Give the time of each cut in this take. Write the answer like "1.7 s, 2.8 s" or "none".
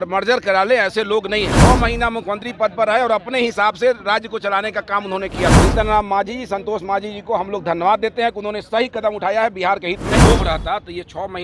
1.5 s, 5.6 s, 10.2 s